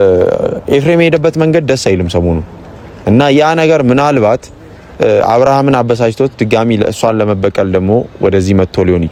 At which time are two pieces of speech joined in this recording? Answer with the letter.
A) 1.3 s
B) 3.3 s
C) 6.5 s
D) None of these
D